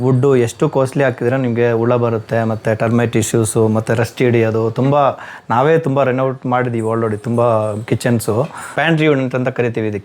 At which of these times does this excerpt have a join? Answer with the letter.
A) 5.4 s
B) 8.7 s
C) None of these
B